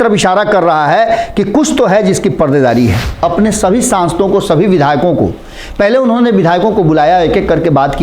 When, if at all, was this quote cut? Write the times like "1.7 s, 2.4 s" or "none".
3.1 s